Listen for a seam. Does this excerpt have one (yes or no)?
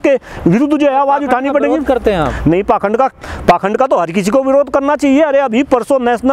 no